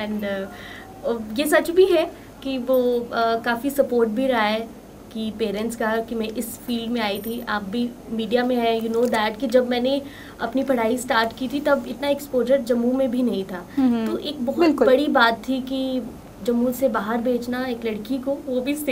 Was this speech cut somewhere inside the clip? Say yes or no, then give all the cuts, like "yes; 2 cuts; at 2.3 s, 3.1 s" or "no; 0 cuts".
no; 0 cuts